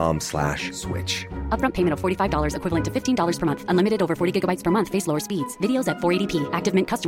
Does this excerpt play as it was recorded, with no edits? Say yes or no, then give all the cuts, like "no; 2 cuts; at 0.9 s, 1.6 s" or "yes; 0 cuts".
yes; 0 cuts